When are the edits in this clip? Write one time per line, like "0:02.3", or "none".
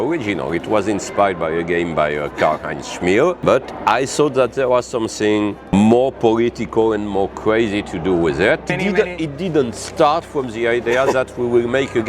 0:03.4
0:05.7
0:08.7